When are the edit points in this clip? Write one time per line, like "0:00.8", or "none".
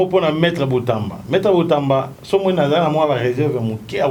none

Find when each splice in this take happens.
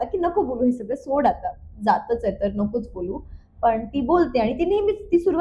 none

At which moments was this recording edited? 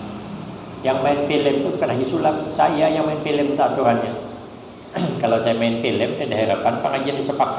none

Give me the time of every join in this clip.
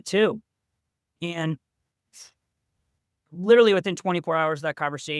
none

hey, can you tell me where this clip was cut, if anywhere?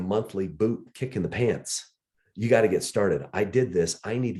none

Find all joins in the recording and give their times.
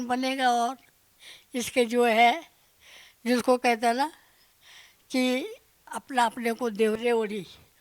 0:06.0
0:07.0

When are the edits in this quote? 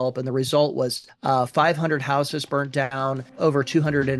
0:01.1
0:03.3

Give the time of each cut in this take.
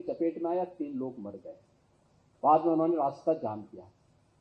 none

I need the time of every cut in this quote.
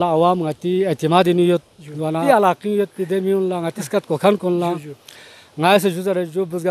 0:02.2

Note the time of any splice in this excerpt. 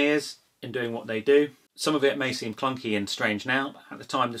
0:01.7

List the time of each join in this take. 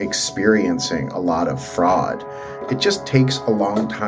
0:02.6

